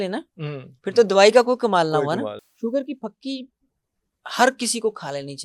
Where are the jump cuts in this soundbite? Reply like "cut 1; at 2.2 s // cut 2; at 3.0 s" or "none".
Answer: cut 1; at 2.4 s